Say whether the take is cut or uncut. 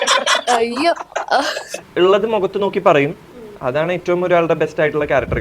cut